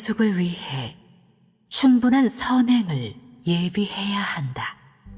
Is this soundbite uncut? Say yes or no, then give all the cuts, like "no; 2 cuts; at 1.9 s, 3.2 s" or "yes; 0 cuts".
yes; 0 cuts